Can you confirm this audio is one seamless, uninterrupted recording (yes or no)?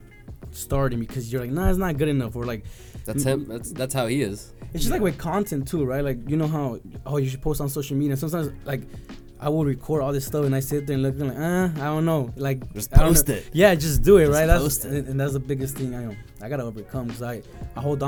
yes